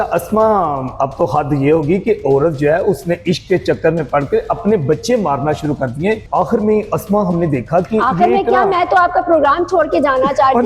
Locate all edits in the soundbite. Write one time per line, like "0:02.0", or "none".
0:06.2